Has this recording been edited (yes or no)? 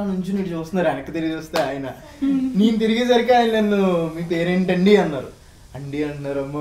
no